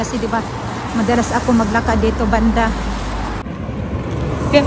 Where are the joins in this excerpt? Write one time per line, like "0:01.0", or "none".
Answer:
0:03.4